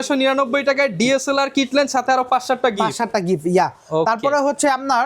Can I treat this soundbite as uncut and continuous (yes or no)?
yes